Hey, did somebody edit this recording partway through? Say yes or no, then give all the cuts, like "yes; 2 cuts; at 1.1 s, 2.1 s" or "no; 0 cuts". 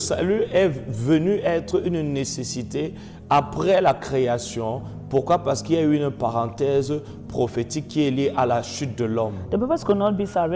no; 0 cuts